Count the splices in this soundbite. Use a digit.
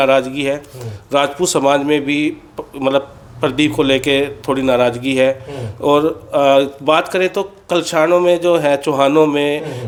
0